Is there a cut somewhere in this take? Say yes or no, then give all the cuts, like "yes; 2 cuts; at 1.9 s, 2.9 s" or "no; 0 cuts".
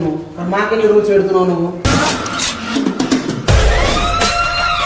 no; 0 cuts